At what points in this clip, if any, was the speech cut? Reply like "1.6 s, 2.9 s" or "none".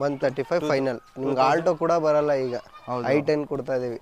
none